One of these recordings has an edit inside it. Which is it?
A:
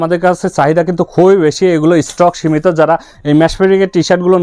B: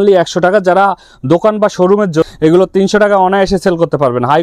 B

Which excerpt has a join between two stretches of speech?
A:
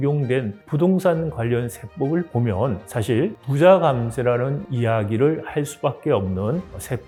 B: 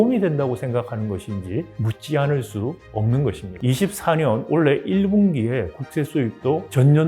B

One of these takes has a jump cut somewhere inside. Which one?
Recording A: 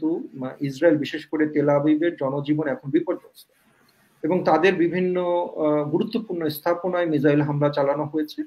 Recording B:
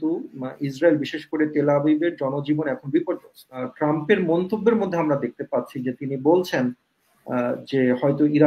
B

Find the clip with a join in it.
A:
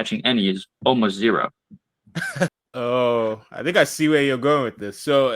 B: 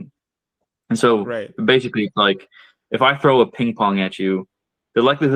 A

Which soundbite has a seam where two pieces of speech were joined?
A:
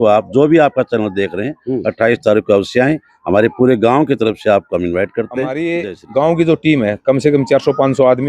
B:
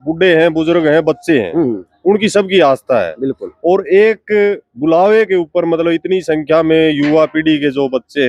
A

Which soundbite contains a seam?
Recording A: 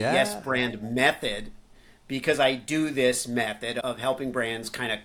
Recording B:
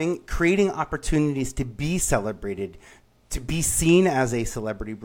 A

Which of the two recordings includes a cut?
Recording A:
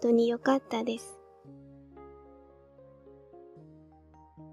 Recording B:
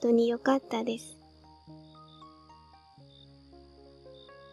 B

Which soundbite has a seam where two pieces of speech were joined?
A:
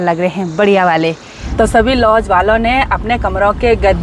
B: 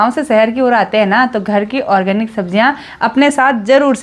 A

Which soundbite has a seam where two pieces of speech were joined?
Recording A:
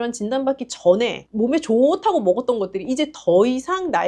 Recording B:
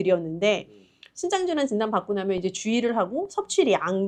A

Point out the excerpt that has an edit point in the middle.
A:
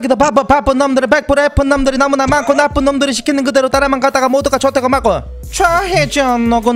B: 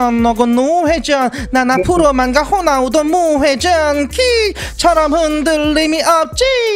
A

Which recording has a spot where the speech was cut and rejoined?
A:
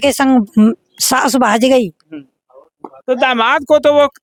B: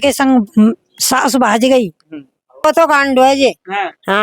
B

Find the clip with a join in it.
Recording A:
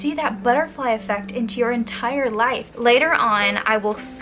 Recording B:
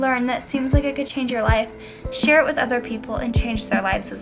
A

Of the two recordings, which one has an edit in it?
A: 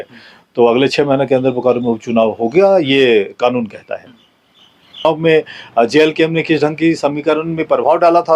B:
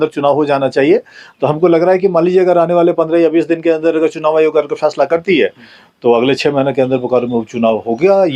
A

